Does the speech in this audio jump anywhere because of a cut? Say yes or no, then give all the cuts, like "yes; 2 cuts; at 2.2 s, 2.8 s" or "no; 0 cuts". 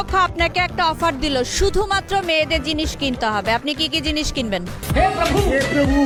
no; 0 cuts